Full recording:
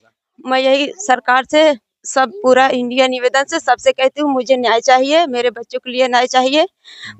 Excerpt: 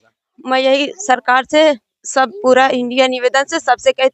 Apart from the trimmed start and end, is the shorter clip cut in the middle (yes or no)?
no